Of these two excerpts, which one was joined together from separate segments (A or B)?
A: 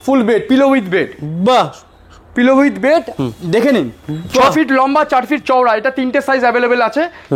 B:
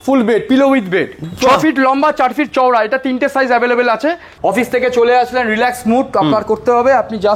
B